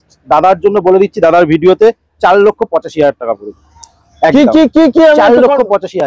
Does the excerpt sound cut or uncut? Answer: uncut